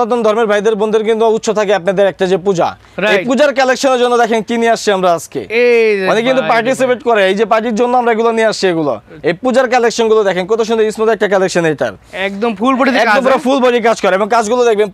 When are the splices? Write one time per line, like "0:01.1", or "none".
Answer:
none